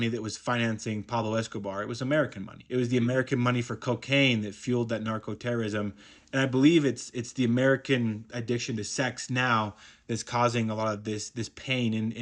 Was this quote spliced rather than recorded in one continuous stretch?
no; 0 cuts

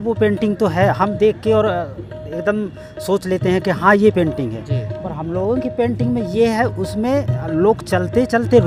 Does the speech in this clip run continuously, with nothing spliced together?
yes; 0 cuts

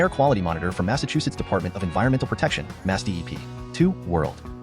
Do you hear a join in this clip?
yes; 1 cut; at 3.6 s

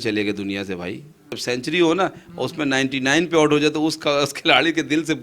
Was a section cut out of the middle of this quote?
yes; 1 cut; at 1.4 s

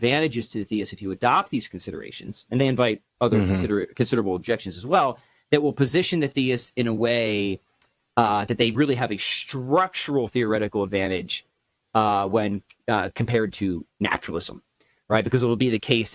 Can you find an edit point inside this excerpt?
no; 0 cuts

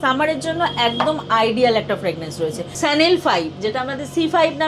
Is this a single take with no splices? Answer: no; 1 cut; at 2.7 s

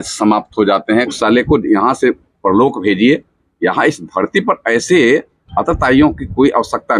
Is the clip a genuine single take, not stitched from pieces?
no; 1 cut; at 1.1 s

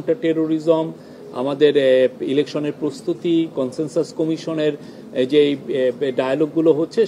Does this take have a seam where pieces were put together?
no; 0 cuts

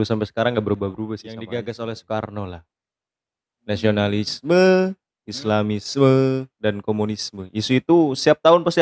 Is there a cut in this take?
yes; 1 cut; at 1.3 s

